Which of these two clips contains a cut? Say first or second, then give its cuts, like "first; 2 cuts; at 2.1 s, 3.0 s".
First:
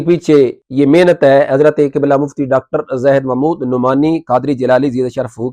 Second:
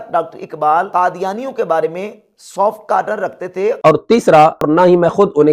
second; 3 cuts; at 0.9 s, 3.8 s, 4.7 s